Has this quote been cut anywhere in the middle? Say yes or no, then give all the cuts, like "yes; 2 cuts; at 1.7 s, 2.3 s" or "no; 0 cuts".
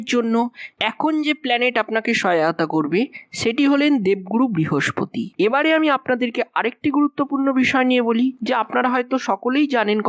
yes; 1 cut; at 5.3 s